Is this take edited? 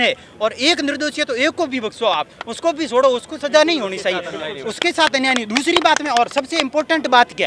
no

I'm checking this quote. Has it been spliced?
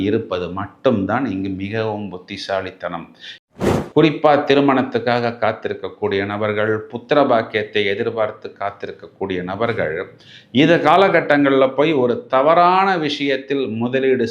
yes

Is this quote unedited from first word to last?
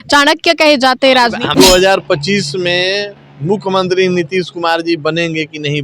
no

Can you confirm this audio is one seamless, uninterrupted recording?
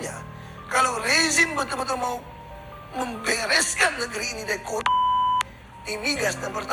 yes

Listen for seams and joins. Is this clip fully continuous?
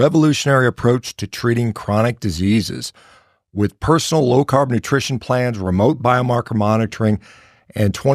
yes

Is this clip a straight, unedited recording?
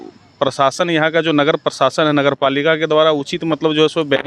yes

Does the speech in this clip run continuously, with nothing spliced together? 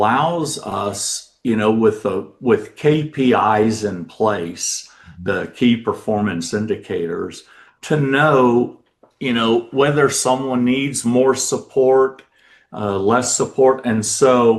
yes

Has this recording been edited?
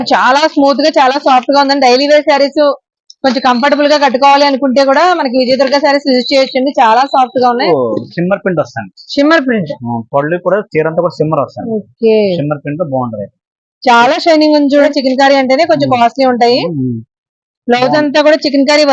yes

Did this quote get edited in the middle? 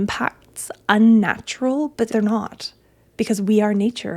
yes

